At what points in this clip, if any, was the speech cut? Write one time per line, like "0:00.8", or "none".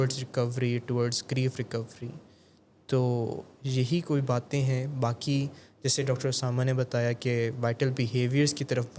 none